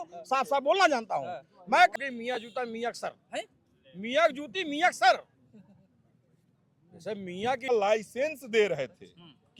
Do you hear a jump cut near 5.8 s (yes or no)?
no